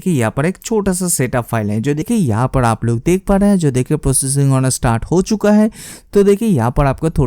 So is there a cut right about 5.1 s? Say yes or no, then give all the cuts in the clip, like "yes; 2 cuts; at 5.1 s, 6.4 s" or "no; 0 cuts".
no; 1 cut; at 2.1 s